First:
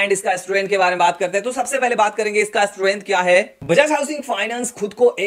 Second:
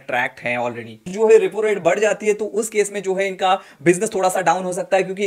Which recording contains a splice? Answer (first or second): second